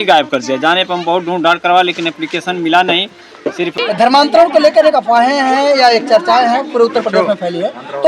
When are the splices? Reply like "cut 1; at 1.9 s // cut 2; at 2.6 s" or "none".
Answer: cut 1; at 3.7 s